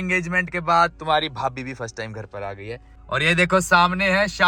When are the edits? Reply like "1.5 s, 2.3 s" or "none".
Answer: 2.9 s